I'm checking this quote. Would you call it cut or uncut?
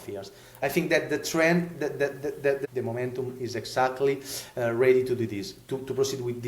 cut